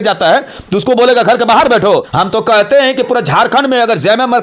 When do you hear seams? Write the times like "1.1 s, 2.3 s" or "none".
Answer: 2.1 s